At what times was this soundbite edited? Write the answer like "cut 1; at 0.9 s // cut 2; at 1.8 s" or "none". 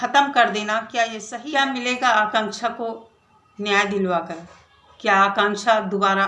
cut 1; at 1.3 s